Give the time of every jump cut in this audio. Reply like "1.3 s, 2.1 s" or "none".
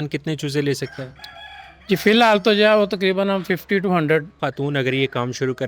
4.4 s